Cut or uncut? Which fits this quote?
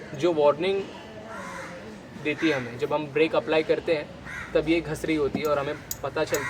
uncut